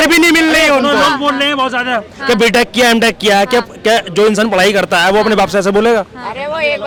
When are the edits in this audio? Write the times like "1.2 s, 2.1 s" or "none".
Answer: none